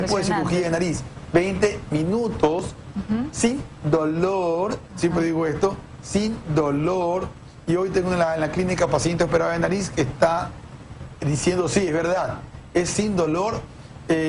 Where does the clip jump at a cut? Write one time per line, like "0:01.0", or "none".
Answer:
none